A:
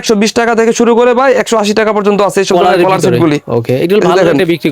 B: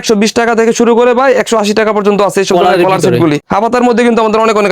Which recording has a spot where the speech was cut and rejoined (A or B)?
B